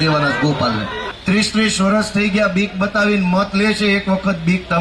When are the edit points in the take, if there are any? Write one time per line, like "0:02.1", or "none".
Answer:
0:01.0